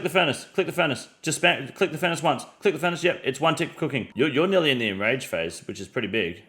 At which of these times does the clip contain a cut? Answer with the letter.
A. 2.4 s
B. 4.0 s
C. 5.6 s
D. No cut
B